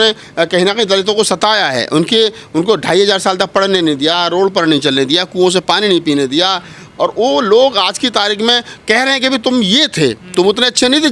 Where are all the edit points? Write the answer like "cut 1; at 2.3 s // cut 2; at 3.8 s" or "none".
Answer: none

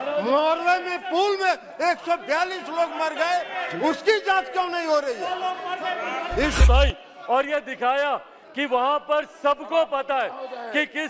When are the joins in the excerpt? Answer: cut 1; at 6.6 s

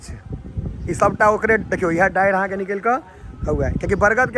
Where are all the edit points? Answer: none

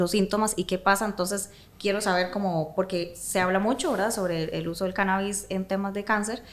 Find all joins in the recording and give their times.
none

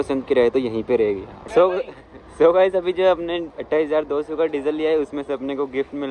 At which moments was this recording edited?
cut 1; at 1.3 s

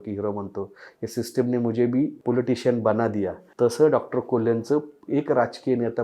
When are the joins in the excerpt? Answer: cut 1; at 2.2 s // cut 2; at 3.4 s // cut 3; at 5.0 s

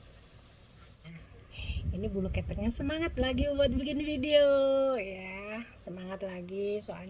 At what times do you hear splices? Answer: cut 1; at 1.1 s

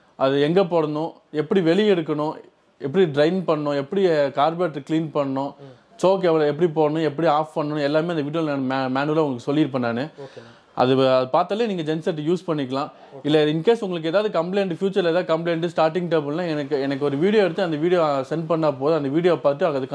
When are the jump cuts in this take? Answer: none

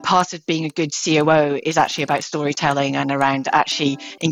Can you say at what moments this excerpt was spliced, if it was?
none

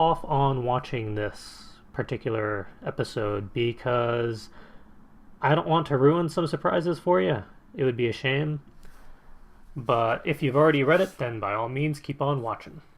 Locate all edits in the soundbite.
cut 1; at 4.1 s

